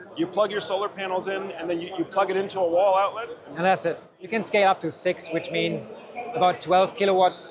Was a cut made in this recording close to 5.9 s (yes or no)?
no